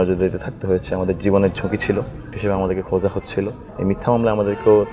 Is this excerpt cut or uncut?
cut